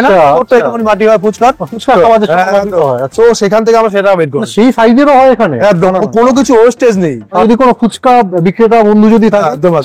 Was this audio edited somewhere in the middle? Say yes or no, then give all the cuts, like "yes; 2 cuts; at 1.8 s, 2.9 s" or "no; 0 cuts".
yes; 1 cut; at 7.4 s